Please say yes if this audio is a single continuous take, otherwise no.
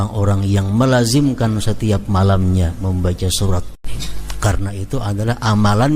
no